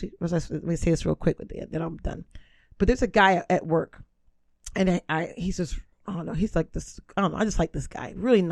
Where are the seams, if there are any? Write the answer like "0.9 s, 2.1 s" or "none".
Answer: none